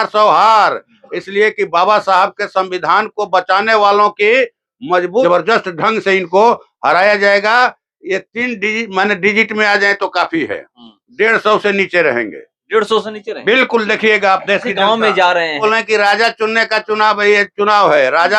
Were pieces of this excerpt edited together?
yes; 2 cuts; at 5.2 s, 15.6 s

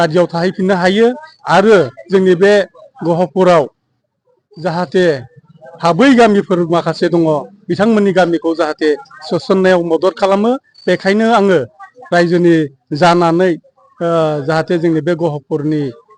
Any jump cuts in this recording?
no; 0 cuts

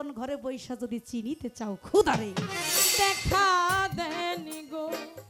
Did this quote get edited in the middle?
yes; 1 cut; at 2.6 s

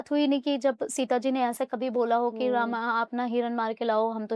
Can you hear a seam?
no; 0 cuts

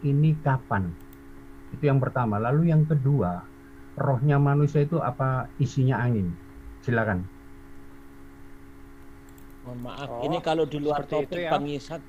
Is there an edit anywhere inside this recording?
no; 0 cuts

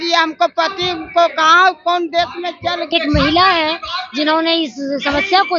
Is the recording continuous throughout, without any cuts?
no; 1 cut; at 2.9 s

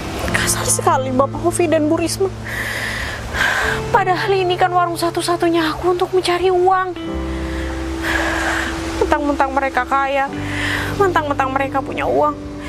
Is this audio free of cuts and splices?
yes; 0 cuts

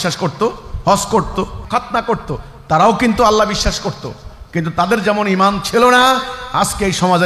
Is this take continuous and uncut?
no; 1 cut; at 1.6 s

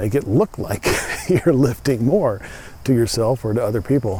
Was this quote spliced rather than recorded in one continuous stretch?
no; 0 cuts

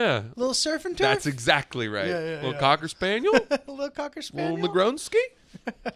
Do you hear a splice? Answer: no; 0 cuts

